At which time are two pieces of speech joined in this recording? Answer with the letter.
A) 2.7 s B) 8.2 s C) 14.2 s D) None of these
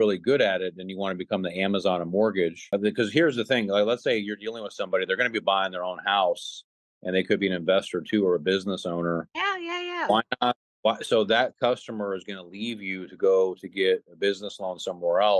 A